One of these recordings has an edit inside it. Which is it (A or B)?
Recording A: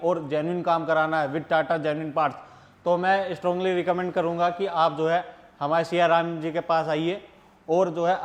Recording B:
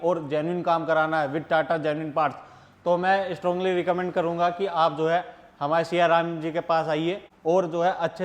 B